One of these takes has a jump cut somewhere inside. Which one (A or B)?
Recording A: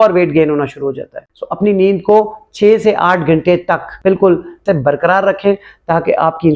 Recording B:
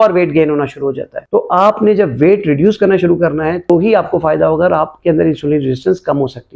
A